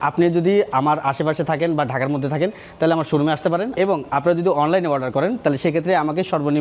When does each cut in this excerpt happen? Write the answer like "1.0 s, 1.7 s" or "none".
3.7 s